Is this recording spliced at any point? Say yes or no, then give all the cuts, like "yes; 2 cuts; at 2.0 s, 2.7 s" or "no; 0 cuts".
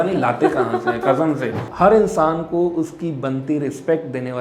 yes; 1 cut; at 1.6 s